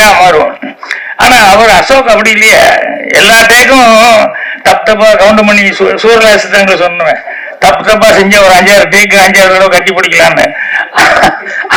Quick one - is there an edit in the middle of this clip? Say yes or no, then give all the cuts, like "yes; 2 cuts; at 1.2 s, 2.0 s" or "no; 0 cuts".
no; 0 cuts